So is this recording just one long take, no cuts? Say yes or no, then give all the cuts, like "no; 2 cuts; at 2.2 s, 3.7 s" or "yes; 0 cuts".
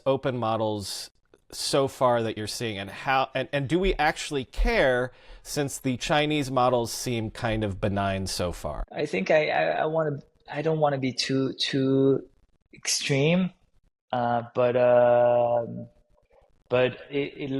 no; 1 cut; at 8.8 s